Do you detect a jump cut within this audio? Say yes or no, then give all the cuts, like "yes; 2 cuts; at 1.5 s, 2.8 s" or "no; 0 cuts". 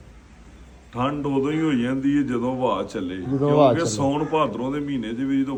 no; 0 cuts